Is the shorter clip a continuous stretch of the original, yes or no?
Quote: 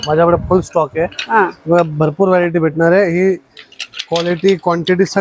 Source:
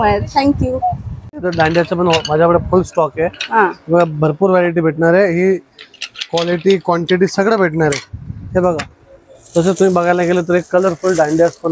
yes